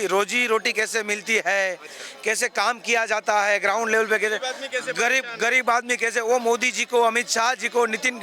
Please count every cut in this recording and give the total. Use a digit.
0